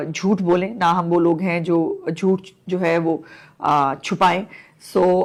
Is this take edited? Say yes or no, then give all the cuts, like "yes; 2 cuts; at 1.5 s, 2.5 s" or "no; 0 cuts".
no; 0 cuts